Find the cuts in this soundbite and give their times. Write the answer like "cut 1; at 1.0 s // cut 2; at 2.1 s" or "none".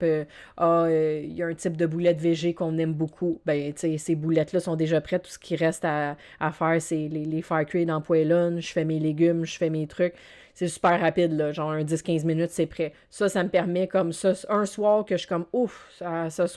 none